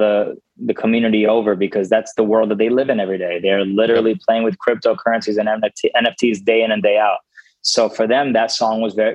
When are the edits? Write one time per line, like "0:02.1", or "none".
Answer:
none